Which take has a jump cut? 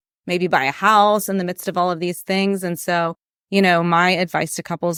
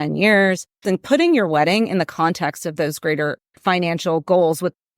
second; 2 cuts; at 0.8 s, 3.6 s

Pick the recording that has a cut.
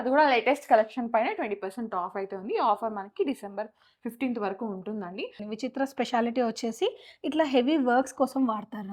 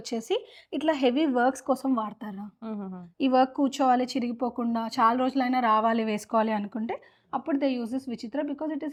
first; 1 cut; at 5.4 s

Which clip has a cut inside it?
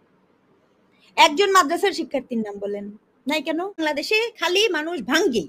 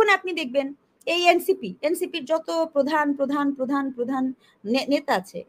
first; 1 cut; at 3.8 s

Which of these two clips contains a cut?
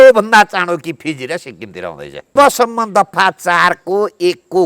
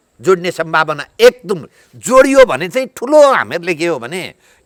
first; 1 cut; at 2.4 s

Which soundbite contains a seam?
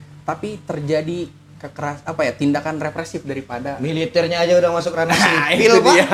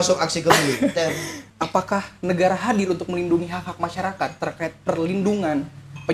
second; 1 cut; at 1.4 s

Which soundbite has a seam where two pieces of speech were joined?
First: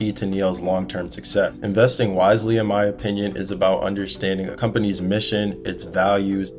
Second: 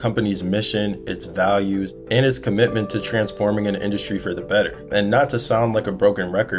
first; 1 cut; at 1.6 s

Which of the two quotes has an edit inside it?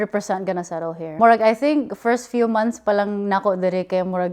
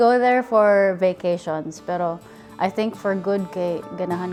first; 1 cut; at 1.0 s

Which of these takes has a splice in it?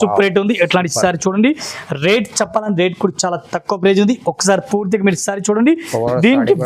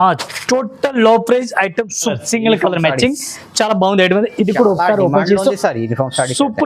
second; 1 cut; at 2.1 s

